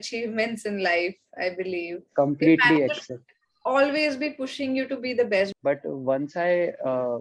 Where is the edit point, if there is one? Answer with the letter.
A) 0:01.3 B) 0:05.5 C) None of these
B